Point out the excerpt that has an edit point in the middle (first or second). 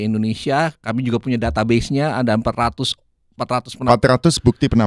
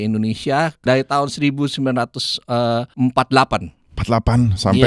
second